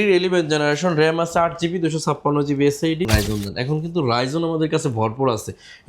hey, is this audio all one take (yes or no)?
no